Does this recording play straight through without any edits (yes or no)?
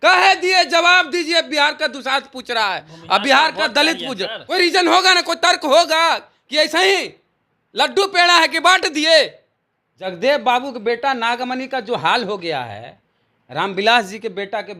no